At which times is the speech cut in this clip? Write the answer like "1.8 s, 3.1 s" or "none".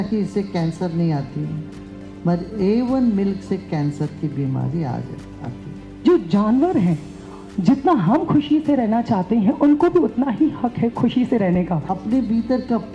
6.0 s, 10.9 s, 11.8 s